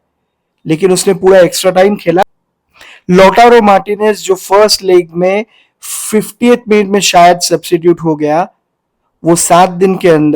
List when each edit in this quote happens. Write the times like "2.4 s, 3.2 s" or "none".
2.2 s